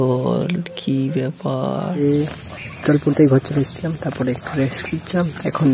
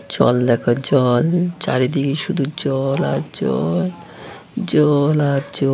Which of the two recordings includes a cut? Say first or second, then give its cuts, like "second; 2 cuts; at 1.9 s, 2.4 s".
first; 1 cut; at 2.0 s